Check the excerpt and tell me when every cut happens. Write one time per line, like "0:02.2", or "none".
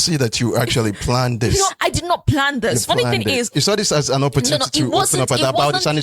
0:01.7
0:03.5